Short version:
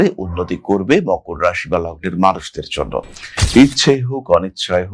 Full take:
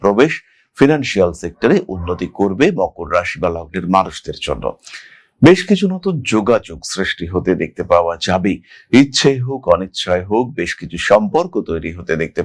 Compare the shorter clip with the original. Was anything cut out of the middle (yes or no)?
yes